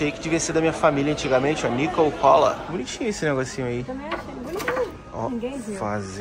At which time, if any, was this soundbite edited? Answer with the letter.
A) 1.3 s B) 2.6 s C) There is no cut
B